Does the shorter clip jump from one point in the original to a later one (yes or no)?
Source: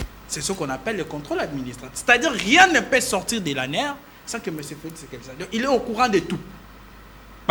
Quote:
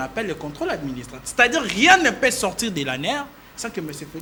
no